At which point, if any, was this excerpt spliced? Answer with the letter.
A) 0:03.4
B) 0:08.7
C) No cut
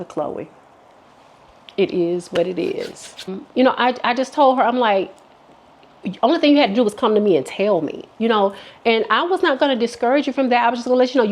A